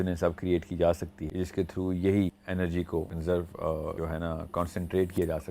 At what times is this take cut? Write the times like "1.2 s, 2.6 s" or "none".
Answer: 1.2 s, 2.8 s, 3.9 s